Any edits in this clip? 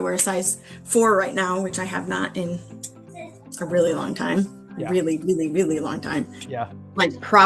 no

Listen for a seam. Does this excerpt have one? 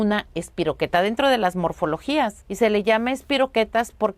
yes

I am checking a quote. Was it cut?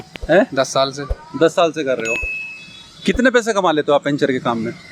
no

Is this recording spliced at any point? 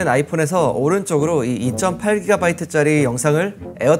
no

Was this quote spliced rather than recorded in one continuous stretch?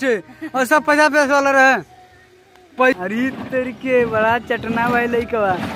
yes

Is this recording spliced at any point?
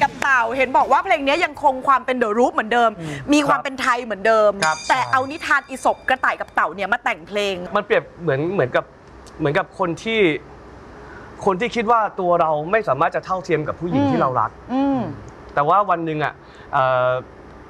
yes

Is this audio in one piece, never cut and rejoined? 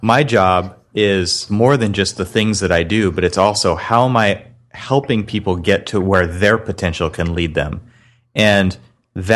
no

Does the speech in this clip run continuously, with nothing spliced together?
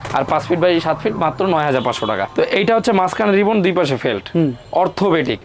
no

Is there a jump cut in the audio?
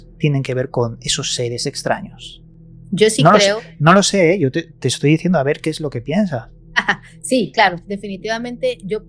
no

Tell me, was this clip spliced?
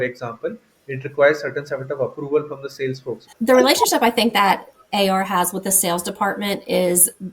yes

